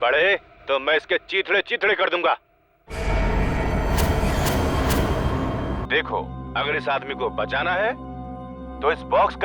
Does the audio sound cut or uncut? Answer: cut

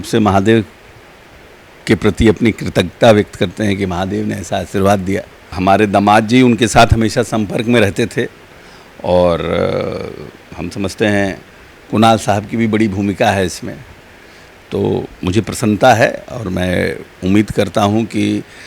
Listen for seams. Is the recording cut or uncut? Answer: cut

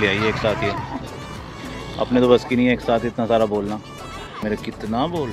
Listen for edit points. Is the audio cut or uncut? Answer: cut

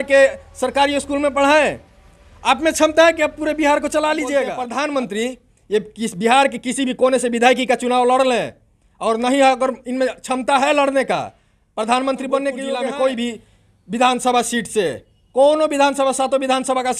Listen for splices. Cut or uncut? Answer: cut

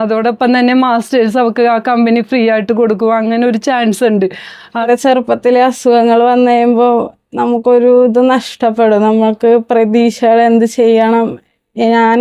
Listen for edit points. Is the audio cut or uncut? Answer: cut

